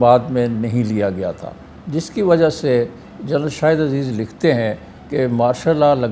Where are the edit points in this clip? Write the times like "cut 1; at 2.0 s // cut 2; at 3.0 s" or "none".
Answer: none